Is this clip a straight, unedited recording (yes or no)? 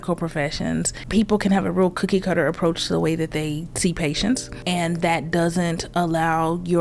no